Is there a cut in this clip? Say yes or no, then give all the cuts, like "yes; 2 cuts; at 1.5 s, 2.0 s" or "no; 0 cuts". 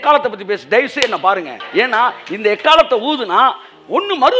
yes; 1 cut; at 1.6 s